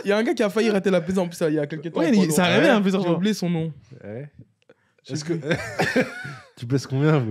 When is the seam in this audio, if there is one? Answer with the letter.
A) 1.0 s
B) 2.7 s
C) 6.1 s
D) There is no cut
D